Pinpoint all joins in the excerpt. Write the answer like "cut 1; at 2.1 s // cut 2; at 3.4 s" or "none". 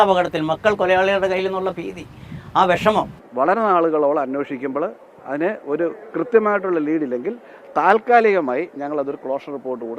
cut 1; at 3.2 s